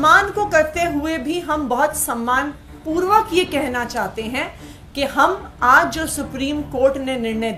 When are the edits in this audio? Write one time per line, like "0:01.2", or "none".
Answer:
none